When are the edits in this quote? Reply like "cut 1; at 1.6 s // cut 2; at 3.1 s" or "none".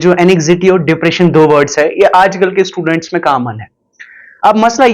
none